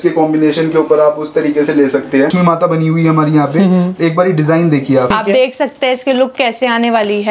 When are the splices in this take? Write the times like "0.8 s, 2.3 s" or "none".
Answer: 2.3 s, 5.1 s

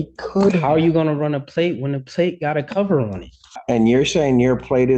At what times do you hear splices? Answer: 3.5 s

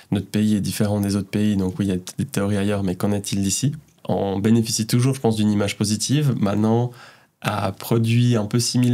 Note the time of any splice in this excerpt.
4.0 s

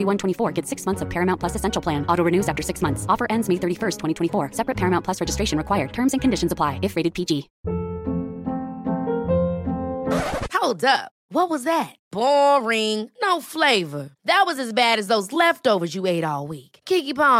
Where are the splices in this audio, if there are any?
7.5 s

